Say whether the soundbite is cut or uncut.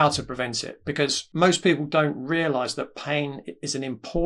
cut